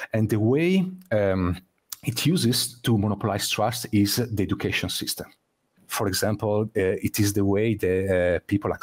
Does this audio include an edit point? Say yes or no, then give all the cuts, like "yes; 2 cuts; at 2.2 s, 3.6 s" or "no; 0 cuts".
yes; 1 cut; at 5.8 s